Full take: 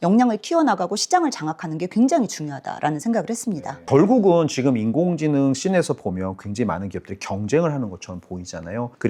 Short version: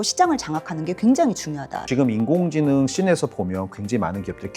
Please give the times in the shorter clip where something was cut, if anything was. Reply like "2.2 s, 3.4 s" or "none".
1.8 s